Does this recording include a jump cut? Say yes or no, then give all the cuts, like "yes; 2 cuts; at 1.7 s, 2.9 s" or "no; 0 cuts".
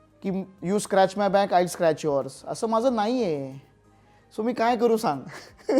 no; 0 cuts